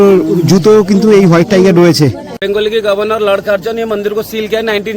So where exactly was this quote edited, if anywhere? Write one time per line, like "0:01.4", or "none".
0:02.3